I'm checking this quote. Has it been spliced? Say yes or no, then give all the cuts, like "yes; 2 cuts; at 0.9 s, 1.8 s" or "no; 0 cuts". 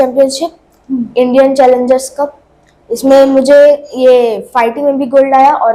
no; 0 cuts